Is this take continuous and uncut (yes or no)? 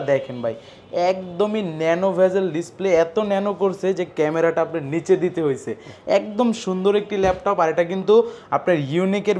yes